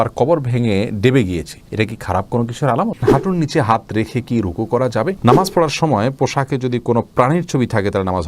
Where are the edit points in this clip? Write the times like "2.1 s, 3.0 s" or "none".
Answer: 3.0 s, 5.2 s